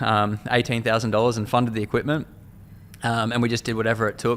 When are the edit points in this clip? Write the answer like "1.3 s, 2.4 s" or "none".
none